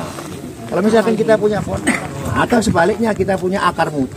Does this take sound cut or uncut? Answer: cut